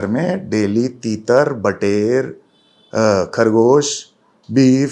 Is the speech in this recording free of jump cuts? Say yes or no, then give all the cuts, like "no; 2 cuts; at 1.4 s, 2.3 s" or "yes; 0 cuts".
yes; 0 cuts